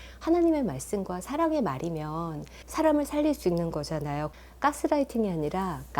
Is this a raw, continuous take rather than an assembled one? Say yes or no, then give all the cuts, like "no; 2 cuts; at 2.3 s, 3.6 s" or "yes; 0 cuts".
no; 1 cut; at 4.3 s